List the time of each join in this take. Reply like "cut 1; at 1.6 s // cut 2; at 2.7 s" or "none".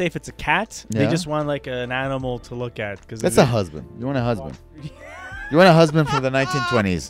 none